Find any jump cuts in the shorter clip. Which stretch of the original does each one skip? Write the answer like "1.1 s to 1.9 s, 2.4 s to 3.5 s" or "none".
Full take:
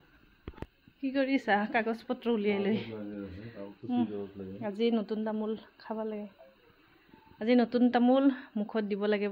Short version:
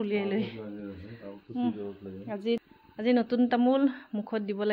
4.9 s to 7.0 s